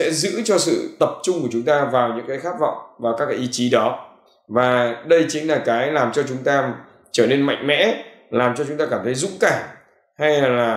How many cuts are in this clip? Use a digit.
0